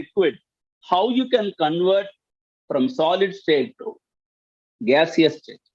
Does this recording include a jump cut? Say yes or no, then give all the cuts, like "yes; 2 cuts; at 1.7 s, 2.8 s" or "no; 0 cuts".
no; 0 cuts